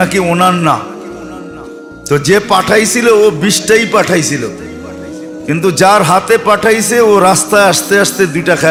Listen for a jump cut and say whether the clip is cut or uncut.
uncut